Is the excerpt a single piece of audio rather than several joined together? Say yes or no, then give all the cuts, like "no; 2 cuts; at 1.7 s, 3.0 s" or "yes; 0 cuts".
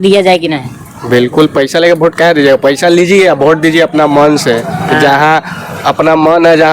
yes; 0 cuts